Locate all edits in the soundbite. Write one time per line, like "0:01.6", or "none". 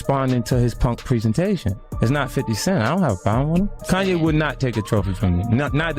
0:01.8
0:03.8